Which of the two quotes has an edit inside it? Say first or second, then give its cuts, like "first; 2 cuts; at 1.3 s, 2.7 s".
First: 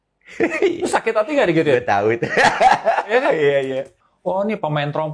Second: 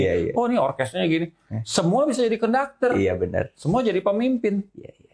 first; 1 cut; at 4.0 s